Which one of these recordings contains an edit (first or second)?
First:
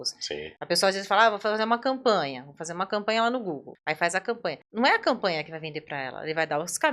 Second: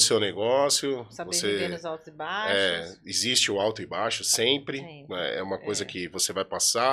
first